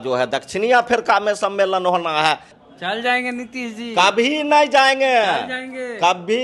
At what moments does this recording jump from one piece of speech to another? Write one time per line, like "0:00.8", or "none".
0:02.5